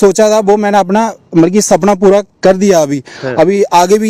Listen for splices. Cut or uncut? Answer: uncut